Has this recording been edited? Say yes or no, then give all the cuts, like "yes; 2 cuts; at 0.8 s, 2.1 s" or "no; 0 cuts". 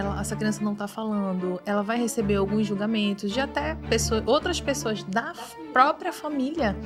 no; 0 cuts